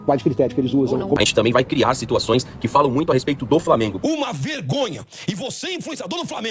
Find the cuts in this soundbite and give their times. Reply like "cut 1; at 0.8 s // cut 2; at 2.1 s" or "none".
cut 1; at 1.2 s // cut 2; at 4.0 s